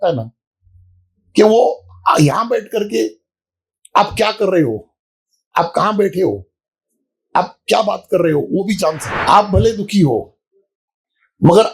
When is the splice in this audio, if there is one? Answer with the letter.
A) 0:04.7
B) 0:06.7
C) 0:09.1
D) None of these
C